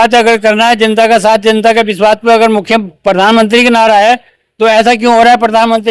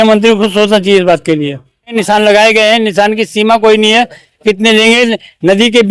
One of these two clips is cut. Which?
second; 1 cut; at 1.8 s

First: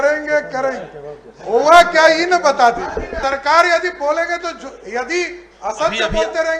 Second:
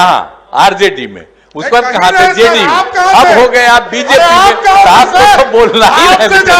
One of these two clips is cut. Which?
first; 1 cut; at 3.2 s

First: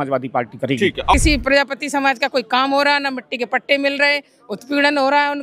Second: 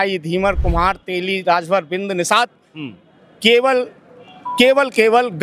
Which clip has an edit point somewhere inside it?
first; 1 cut; at 1.1 s

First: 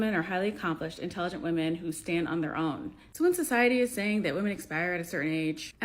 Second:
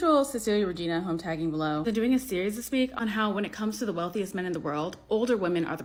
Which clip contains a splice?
first; 1 cut; at 4.1 s

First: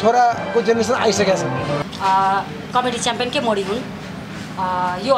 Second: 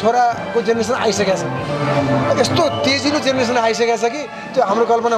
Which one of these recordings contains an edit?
first; 1 cut; at 1.8 s

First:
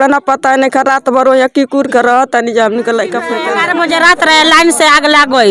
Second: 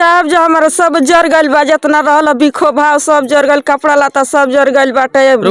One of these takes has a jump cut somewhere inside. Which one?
first; 1 cut; at 3.4 s

